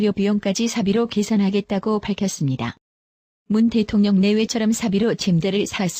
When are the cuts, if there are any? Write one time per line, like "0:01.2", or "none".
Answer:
none